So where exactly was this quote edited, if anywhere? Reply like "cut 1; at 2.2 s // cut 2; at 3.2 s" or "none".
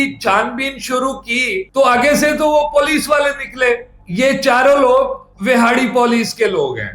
cut 1; at 3.9 s